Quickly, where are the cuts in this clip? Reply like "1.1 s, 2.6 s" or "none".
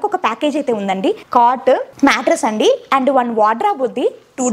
1.2 s, 1.9 s